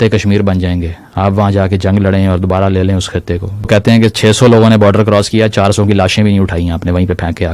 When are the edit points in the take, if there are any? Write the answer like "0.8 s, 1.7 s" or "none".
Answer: 3.7 s